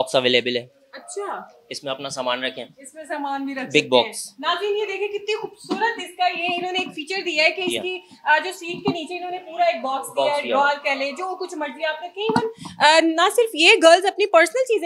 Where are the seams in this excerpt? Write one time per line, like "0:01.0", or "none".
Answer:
none